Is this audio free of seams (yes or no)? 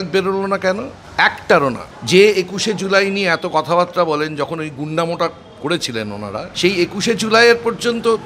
no